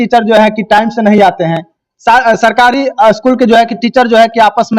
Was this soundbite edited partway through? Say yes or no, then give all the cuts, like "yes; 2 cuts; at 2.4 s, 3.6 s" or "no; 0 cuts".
no; 0 cuts